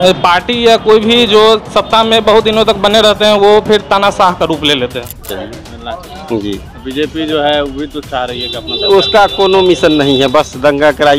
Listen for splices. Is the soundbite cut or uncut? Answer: cut